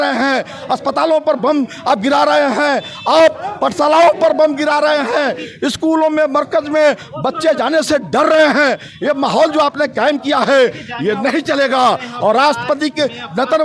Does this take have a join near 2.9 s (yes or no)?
no